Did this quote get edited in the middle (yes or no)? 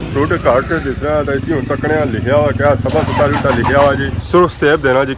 yes